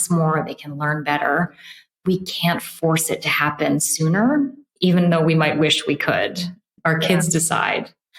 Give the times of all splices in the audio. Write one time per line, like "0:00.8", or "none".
0:06.7